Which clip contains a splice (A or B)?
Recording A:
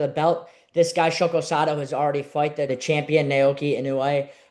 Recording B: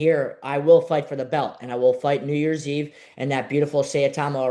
A